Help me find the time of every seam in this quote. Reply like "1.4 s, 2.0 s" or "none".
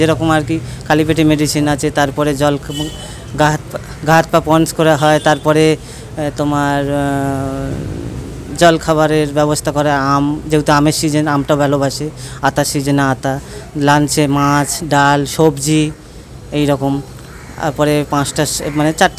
none